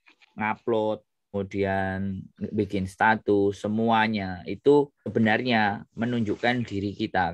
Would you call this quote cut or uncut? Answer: cut